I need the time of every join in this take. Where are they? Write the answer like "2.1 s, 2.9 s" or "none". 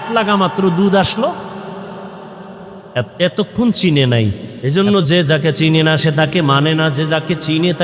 4.5 s